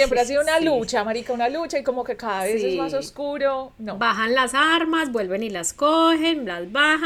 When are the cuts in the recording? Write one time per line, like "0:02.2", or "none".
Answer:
none